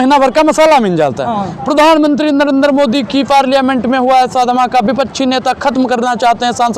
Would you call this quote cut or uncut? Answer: uncut